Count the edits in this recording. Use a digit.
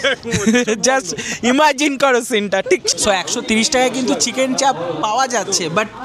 1